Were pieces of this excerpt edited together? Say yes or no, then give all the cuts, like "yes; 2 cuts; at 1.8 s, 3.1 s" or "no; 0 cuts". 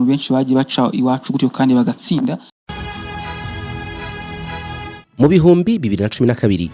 yes; 1 cut; at 2.6 s